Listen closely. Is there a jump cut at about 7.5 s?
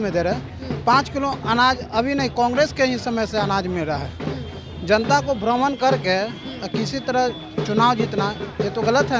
no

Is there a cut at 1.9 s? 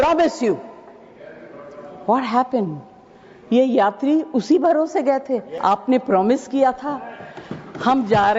no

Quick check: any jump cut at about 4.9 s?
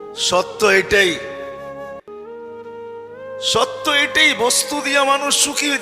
no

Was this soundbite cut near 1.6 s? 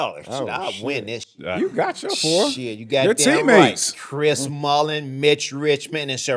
yes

